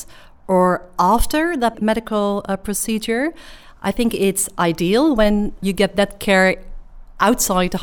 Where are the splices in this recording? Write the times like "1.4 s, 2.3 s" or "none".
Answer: 1.7 s, 5.6 s